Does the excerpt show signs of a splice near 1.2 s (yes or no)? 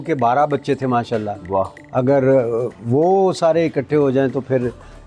no